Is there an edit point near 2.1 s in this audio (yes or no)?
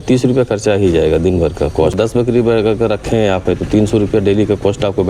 yes